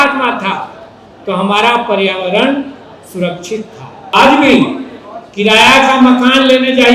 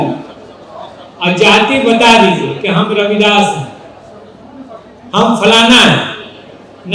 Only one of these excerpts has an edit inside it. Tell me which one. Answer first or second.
first